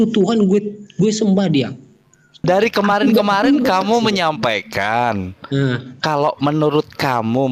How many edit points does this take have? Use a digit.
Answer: 1